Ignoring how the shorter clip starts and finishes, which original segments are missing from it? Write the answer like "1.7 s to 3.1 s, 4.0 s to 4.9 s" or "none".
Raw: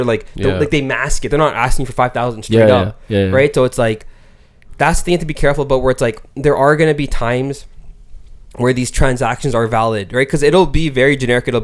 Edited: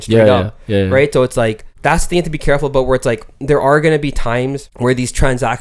4.1 s to 4.6 s, 7.6 s to 8.5 s